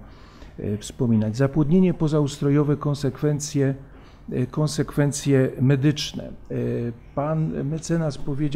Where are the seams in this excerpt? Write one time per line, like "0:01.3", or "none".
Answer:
none

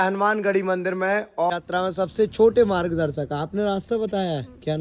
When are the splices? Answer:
0:01.5

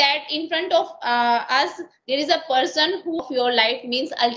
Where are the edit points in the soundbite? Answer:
0:03.2

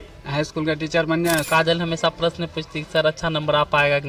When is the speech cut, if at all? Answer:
0:01.4

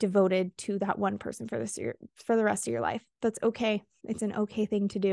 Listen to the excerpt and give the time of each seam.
0:04.0

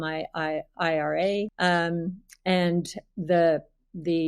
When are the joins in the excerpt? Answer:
0:01.5

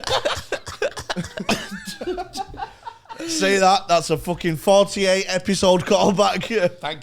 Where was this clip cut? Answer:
none

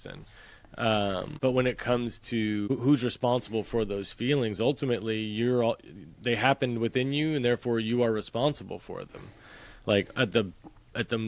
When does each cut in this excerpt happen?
0:01.3
0:02.7

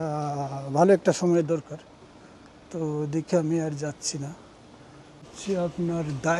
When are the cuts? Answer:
0:05.3

